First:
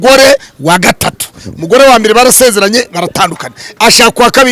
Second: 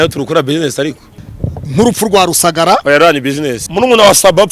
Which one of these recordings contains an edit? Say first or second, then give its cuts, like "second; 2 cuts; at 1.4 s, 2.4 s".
second; 2 cuts; at 1.1 s, 3.6 s